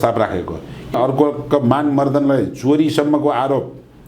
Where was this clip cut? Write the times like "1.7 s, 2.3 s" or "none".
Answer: 0.9 s